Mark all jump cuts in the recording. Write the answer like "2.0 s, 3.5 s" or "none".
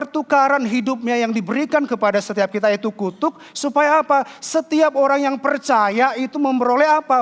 none